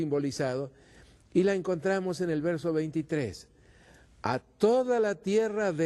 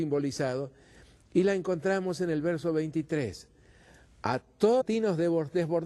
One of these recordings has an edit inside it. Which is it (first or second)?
first